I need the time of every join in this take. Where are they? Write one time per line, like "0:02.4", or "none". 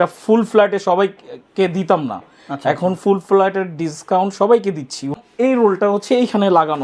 0:05.2